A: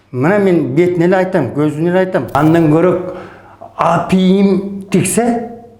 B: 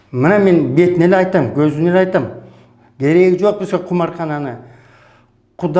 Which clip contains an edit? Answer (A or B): A